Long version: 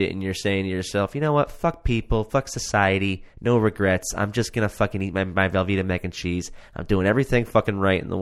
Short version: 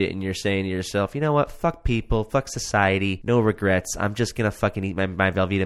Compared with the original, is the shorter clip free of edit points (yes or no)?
no